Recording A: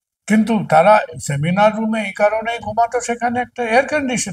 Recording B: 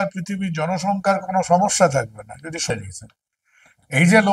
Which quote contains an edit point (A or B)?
B